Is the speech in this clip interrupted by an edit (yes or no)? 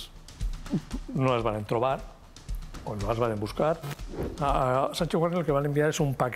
yes